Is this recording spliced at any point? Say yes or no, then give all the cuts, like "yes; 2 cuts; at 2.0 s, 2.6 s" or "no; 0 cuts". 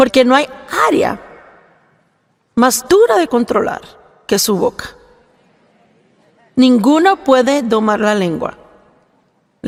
no; 0 cuts